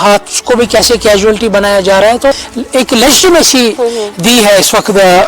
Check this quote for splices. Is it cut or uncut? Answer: cut